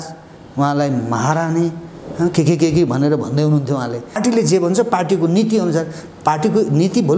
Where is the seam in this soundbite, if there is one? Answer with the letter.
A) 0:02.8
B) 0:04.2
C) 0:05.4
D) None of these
B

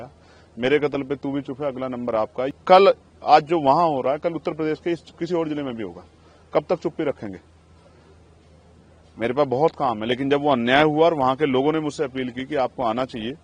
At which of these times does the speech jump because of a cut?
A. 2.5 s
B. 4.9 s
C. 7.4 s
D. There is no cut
A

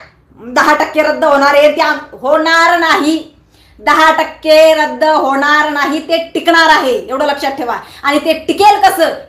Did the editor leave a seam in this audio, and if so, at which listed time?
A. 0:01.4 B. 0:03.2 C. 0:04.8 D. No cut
D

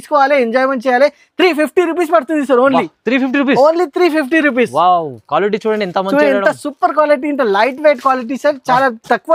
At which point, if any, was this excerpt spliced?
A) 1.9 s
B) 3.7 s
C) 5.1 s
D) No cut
D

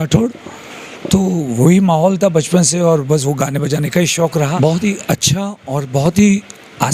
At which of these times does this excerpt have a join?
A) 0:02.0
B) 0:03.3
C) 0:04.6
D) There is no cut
C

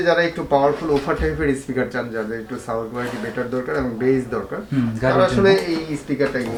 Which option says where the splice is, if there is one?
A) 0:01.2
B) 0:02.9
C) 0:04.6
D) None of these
D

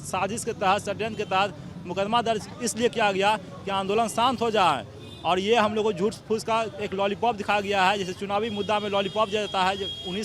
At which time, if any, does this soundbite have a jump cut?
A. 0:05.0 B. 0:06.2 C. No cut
C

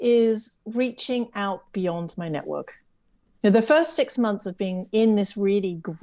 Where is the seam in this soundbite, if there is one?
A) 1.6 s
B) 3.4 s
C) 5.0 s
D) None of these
D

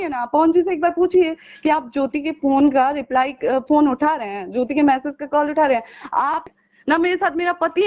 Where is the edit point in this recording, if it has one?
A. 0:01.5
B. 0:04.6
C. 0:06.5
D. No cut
C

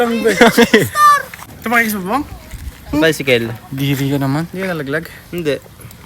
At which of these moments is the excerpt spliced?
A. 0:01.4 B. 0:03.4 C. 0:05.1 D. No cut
A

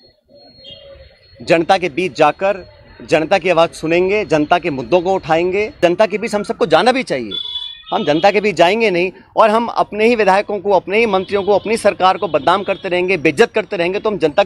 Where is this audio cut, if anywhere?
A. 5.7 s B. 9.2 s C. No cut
A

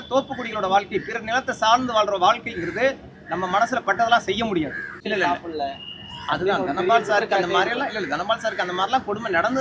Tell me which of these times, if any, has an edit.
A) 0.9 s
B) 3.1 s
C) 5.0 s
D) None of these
C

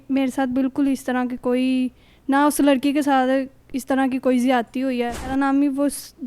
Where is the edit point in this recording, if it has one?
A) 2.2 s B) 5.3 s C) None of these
B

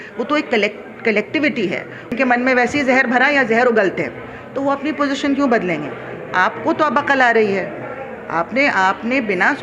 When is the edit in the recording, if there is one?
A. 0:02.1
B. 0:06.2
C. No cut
A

